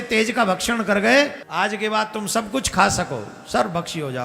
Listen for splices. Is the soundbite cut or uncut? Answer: cut